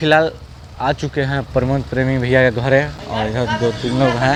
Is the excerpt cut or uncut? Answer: uncut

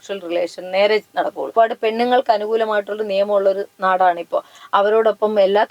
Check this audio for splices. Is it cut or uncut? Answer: cut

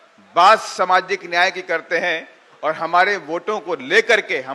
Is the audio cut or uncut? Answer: uncut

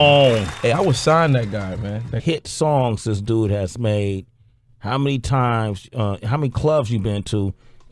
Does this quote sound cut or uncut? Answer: uncut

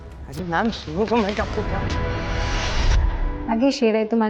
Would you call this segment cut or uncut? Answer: cut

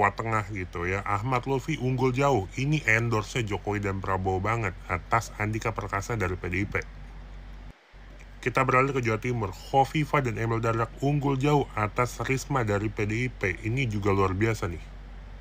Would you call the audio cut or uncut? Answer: uncut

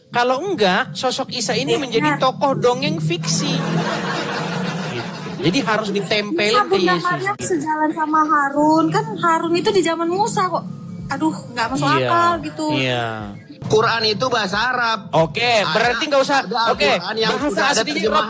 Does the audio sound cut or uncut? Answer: cut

